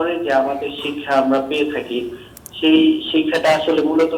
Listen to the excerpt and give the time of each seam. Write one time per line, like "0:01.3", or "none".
none